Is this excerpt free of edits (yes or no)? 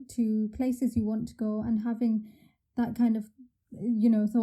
yes